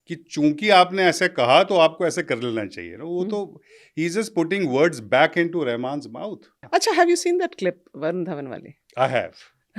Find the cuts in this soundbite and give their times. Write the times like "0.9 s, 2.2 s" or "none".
6.5 s